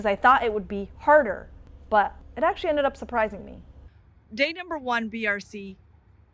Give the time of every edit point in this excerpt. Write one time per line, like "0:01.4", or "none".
0:02.2
0:03.6